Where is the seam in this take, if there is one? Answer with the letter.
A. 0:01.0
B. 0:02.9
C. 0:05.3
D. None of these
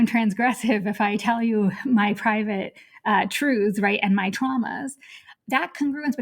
C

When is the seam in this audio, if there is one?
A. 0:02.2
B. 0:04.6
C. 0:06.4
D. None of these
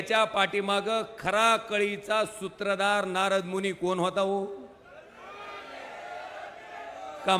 D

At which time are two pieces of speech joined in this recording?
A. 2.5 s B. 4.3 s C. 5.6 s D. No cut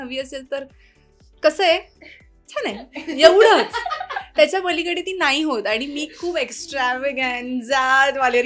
D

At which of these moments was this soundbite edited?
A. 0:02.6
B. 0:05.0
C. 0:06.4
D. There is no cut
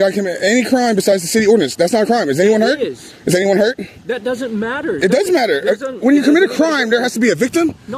D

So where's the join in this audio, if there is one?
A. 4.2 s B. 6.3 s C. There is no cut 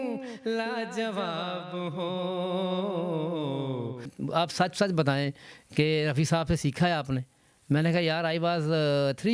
A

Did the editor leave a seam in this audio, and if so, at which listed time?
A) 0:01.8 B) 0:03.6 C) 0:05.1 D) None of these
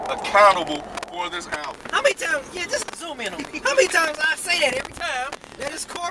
A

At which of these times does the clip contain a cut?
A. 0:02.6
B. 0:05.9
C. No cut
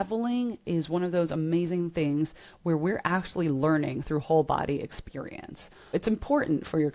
B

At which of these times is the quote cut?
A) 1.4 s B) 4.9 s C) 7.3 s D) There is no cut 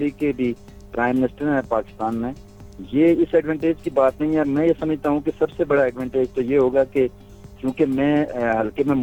D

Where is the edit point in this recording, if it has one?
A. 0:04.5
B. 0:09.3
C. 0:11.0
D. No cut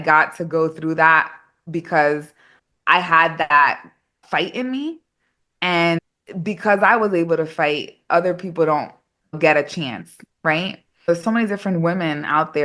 C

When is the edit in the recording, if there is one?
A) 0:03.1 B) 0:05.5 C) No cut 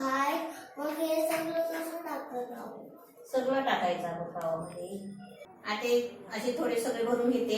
B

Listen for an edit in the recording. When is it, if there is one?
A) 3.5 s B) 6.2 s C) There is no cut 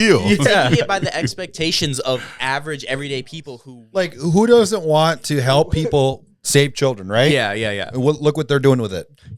A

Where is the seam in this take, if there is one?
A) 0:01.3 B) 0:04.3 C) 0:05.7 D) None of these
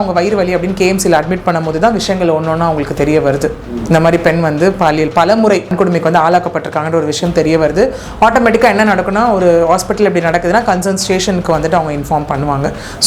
C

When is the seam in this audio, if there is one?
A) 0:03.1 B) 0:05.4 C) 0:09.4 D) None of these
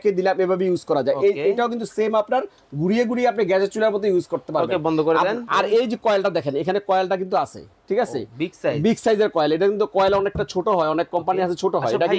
B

